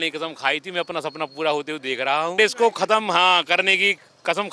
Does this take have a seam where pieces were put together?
yes; 1 cut; at 2.4 s

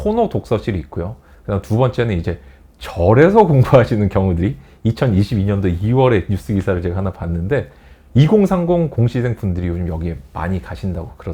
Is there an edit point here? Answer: no; 0 cuts

